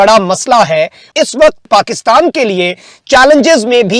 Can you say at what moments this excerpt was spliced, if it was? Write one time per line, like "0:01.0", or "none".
0:01.0